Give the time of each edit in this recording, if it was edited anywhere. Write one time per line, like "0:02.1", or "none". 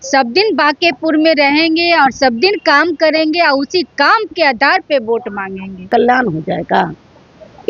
0:05.9

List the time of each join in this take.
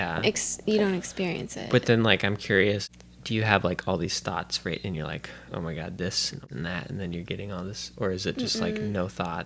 0:03.0
0:06.4

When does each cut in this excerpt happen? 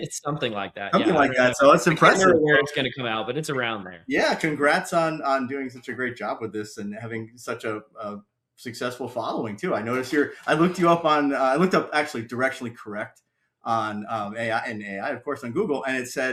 none

